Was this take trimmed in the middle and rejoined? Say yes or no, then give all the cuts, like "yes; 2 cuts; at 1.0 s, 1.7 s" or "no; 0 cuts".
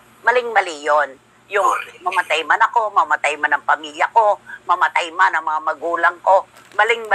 no; 0 cuts